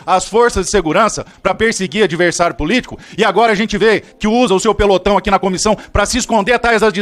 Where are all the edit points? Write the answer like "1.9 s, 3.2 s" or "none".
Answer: none